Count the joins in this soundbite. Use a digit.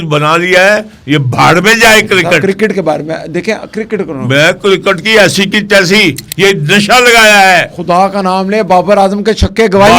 1